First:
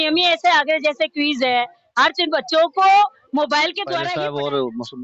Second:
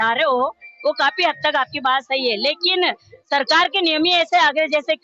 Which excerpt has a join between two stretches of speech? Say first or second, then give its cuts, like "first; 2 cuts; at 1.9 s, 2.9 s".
first; 1 cut; at 3.9 s